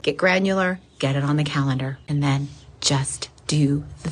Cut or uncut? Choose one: cut